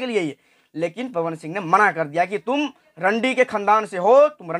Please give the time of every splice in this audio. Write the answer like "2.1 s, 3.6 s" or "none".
none